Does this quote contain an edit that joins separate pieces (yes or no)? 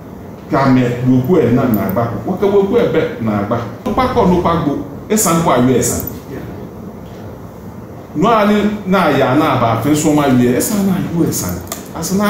yes